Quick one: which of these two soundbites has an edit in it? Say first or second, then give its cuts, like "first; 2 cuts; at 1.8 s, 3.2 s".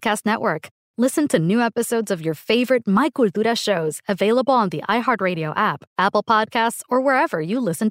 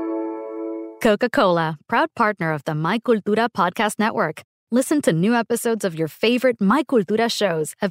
second; 1 cut; at 0.9 s